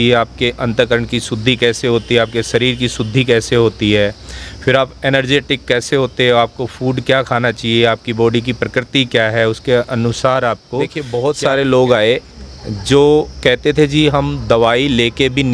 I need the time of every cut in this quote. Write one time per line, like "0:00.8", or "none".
0:11.0